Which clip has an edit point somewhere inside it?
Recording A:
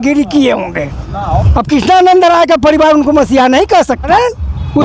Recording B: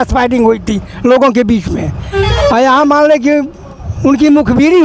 A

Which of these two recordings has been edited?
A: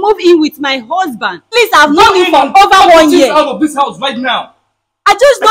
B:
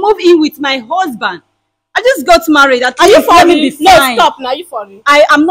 A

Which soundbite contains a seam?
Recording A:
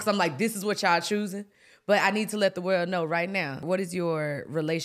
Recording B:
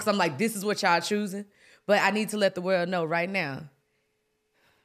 A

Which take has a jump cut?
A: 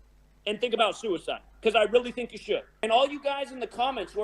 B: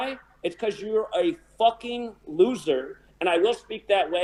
A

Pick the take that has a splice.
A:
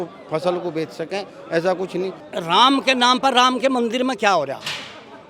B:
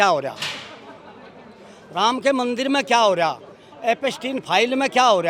A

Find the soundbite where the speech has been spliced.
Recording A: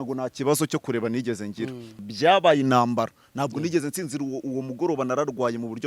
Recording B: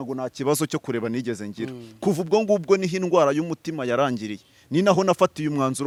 A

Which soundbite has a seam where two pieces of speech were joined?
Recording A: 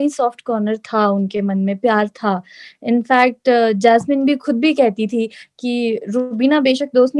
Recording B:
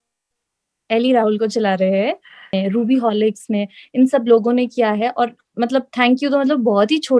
B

